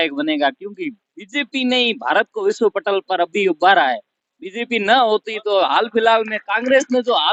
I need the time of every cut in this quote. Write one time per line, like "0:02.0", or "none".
none